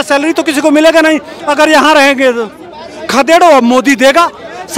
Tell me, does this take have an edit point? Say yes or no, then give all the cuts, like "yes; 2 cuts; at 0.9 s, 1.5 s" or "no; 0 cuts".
no; 0 cuts